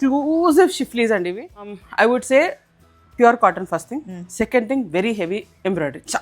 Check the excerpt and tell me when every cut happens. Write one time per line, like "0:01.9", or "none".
0:01.8